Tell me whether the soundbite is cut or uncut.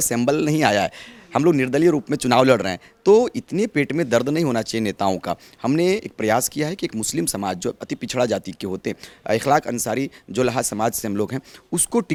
uncut